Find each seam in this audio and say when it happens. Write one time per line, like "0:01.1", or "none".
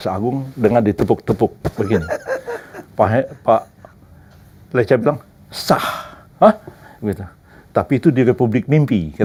none

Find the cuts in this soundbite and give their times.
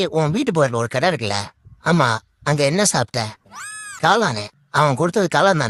none

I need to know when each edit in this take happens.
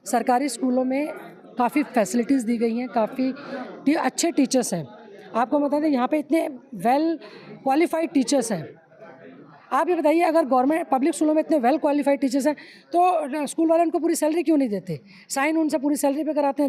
none

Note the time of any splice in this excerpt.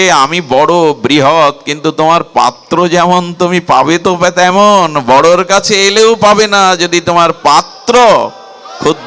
none

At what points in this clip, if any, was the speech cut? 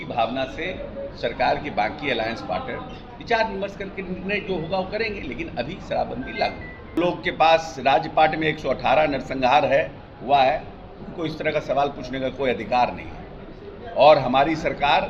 0:07.0

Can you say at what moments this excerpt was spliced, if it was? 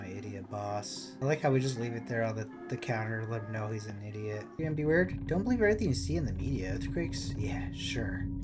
0:01.1
0:04.6

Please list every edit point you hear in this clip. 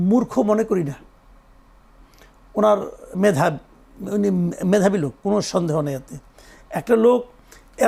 none

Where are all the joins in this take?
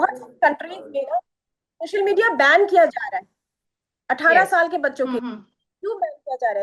none

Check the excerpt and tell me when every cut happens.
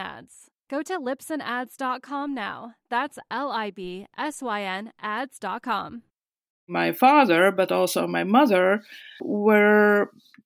0:06.7
0:09.3

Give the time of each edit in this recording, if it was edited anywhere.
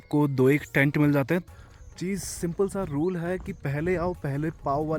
0:01.4

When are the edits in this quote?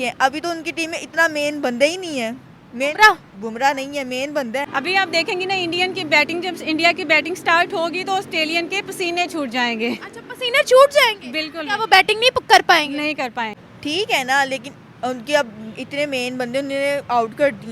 0:04.7
0:13.6

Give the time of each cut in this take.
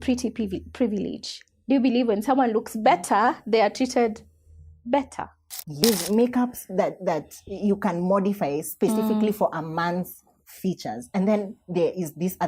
0:05.8

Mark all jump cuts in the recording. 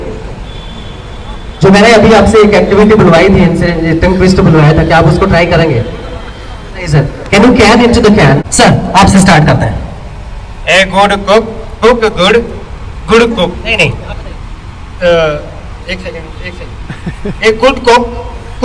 0:08.4

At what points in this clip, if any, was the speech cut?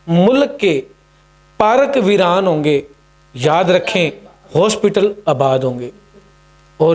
none

